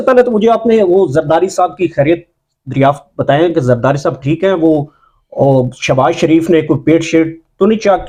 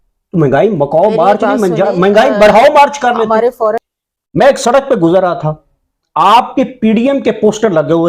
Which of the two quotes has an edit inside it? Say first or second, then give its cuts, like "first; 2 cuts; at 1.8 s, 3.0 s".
second; 1 cut; at 3.8 s